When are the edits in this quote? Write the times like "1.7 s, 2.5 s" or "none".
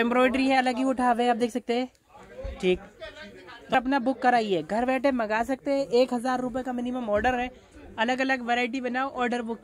3.7 s